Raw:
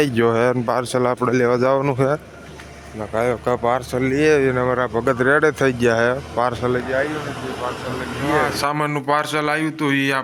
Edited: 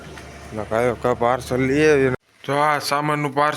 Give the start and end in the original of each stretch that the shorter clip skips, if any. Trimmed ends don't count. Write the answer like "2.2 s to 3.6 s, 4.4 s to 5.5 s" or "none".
4.6 s to 7.9 s